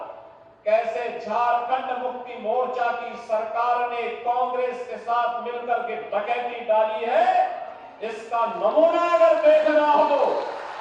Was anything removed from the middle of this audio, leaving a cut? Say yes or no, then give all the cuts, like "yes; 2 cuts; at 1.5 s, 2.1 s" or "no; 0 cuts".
no; 0 cuts